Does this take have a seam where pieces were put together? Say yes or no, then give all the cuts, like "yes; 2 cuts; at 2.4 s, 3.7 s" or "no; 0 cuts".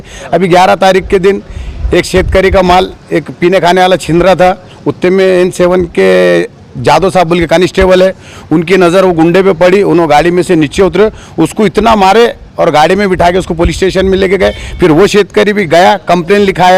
no; 0 cuts